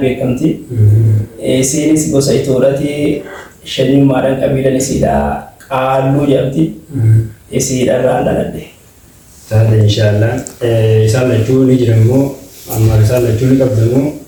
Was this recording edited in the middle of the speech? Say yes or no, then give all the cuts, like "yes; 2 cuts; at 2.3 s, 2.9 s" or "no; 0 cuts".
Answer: no; 0 cuts